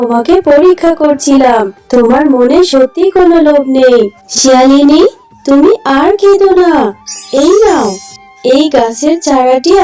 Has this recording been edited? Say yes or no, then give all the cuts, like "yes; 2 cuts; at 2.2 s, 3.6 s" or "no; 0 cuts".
yes; 1 cut; at 4.1 s